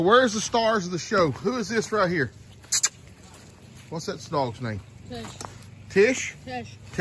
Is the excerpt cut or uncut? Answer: uncut